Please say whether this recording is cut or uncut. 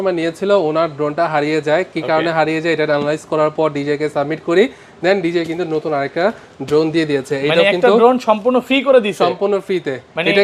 uncut